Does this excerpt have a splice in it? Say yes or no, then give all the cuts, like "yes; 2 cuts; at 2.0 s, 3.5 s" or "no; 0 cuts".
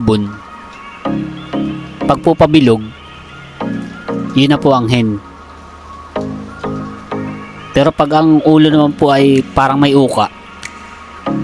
yes; 4 cuts; at 2.9 s, 4.3 s, 5.6 s, 7.4 s